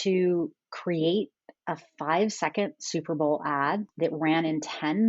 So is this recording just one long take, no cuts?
no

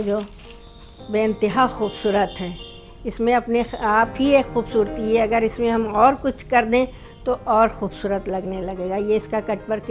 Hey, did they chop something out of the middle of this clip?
no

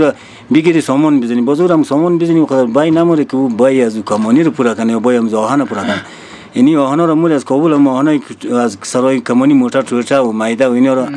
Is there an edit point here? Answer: no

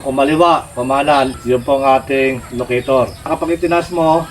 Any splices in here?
yes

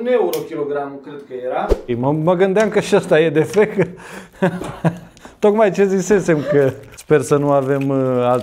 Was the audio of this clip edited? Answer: yes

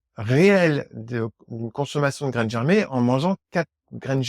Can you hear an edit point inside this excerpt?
no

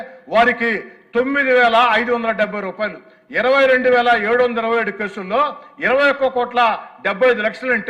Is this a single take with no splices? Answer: yes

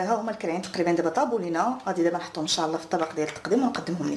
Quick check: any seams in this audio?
no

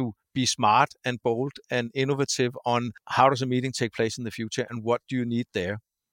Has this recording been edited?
yes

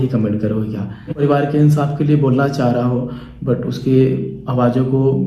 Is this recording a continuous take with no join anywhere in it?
no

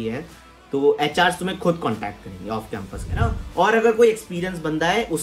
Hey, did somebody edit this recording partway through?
yes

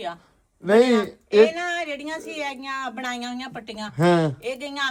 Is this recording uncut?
yes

